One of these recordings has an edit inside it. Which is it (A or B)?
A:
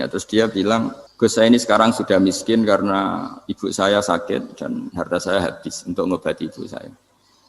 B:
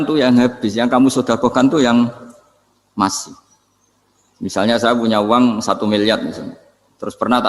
A